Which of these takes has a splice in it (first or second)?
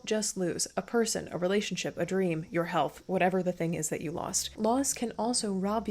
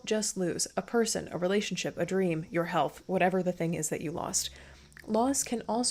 first